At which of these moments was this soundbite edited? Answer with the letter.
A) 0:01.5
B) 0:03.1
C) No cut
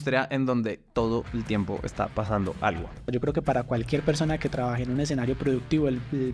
B